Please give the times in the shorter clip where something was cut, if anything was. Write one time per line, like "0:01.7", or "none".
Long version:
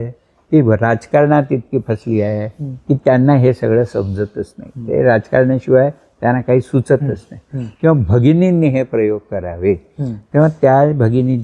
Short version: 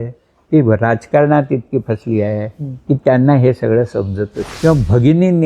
0:04.4